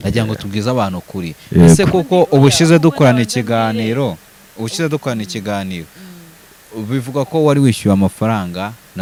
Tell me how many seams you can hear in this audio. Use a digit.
0